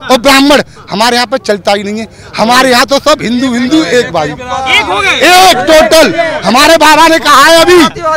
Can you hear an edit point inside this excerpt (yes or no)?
no